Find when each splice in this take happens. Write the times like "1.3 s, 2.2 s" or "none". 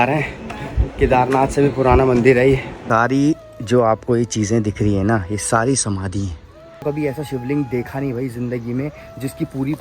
2.8 s, 6.8 s